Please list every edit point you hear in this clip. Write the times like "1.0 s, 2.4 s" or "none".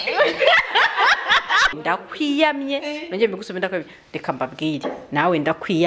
1.8 s